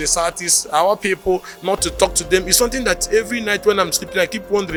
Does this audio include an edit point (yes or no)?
no